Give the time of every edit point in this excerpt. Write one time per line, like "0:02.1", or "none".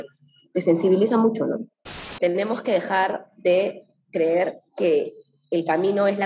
0:02.1